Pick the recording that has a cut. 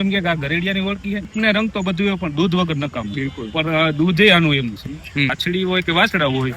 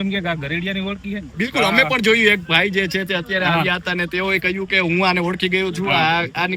first; 2 cuts; at 1.3 s, 5.4 s

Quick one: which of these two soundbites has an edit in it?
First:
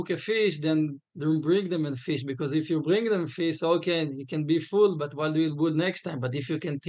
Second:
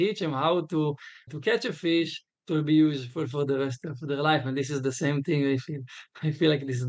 second; 1 cut; at 1.3 s

